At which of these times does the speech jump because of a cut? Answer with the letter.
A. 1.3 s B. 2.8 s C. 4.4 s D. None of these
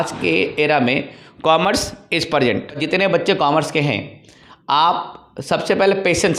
B